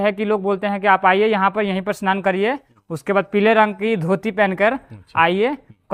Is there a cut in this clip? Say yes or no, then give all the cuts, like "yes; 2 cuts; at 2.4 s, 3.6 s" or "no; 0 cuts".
no; 0 cuts